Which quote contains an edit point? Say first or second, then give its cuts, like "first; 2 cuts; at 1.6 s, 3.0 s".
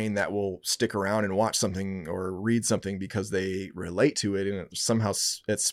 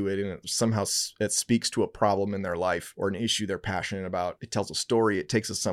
second; 2 cuts; at 2.9 s, 4.4 s